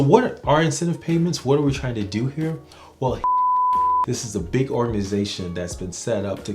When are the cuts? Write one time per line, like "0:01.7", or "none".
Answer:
none